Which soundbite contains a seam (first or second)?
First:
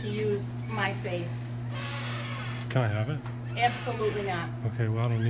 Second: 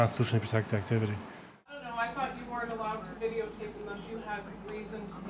second